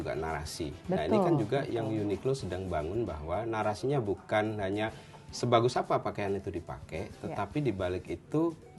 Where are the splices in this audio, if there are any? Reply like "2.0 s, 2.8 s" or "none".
none